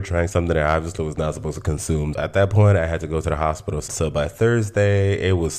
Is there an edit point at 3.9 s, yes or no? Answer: yes